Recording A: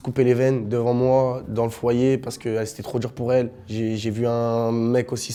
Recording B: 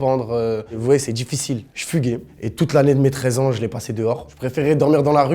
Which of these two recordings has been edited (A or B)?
B